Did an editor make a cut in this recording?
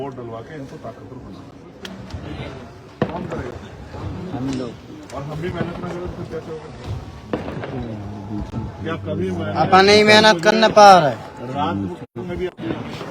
yes; 1 cut; at 1.9 s

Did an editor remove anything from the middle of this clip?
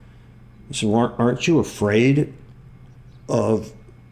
no; 0 cuts

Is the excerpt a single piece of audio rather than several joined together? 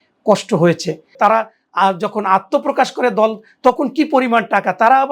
no; 1 cut; at 1.1 s

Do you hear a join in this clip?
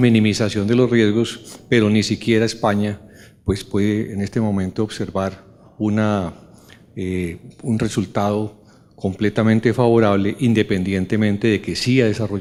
no; 0 cuts

